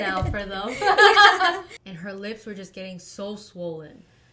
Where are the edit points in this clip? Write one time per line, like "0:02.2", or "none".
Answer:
0:01.7